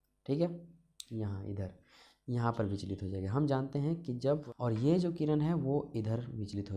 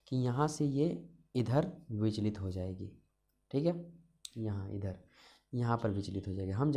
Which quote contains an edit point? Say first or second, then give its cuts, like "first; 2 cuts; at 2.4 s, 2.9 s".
first; 1 cut; at 4.4 s